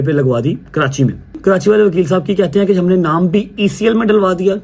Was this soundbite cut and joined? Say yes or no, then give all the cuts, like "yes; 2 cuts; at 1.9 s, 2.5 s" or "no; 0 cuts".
yes; 1 cut; at 1.4 s